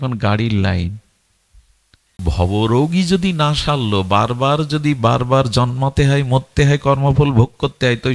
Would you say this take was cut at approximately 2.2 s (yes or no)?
yes